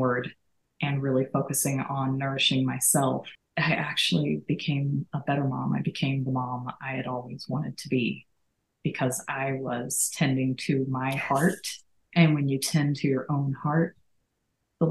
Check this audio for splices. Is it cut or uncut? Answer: cut